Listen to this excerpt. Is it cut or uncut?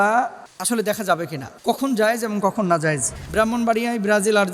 cut